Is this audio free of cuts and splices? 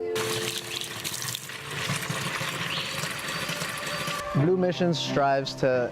no; 1 cut; at 4.3 s

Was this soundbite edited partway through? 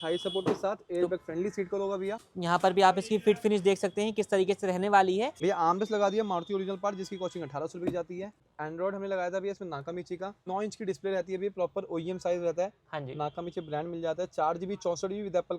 yes; 4 cuts; at 2.2 s, 5.3 s, 8.4 s, 10.5 s

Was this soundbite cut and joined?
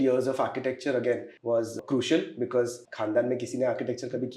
yes; 2 cuts; at 1.7 s, 2.9 s

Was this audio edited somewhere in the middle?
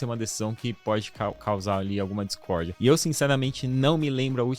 yes; 1 cut; at 2.7 s

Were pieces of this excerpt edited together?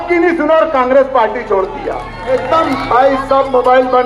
yes; 1 cut; at 2.3 s

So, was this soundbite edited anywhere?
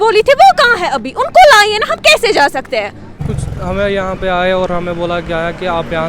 yes; 1 cut; at 3.2 s

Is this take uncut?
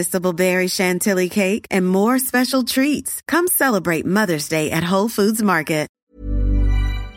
no; 1 cut; at 6.1 s

